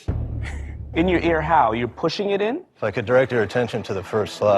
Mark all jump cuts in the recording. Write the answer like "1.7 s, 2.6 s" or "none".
2.7 s